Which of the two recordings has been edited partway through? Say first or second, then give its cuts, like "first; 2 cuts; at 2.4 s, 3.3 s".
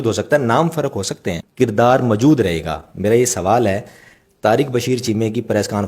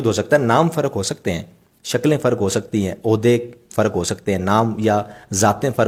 first; 1 cut; at 1.4 s